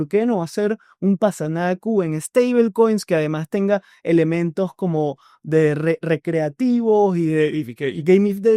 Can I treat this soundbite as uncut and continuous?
yes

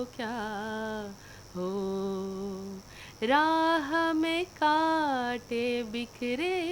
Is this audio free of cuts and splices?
yes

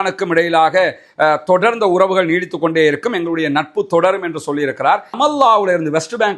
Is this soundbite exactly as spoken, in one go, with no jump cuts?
no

